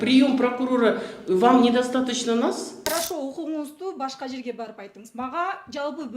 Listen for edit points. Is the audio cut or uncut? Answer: cut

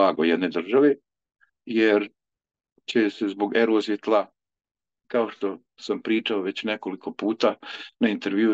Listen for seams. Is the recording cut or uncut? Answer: uncut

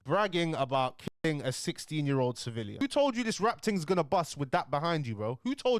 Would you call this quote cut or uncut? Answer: cut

